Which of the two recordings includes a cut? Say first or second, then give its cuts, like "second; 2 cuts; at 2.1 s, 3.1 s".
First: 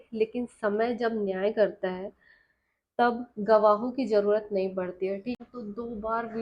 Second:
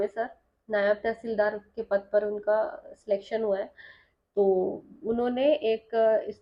first; 1 cut; at 5.4 s